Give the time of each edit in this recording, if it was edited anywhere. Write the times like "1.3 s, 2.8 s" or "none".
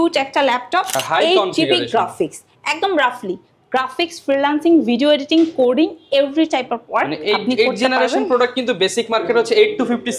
1.0 s